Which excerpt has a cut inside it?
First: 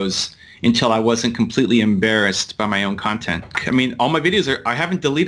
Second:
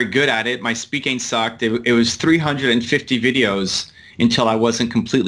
first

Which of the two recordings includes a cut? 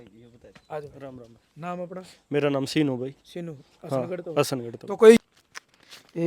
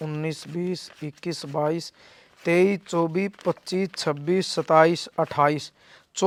first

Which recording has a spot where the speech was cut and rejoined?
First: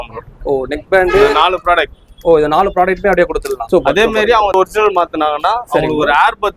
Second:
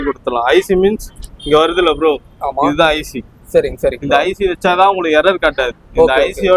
first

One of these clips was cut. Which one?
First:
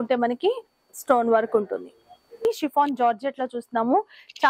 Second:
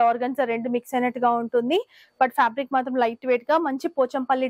first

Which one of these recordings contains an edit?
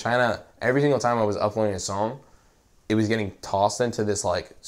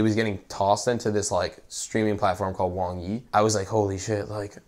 second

